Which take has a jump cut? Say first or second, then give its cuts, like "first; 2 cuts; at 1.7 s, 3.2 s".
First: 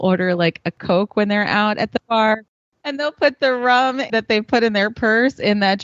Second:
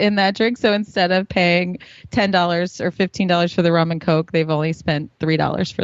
first; 3 cuts; at 0.8 s, 2.5 s, 4.1 s